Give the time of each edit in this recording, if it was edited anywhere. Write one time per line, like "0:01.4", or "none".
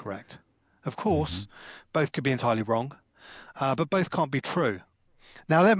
none